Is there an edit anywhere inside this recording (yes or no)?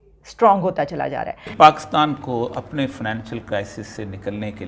yes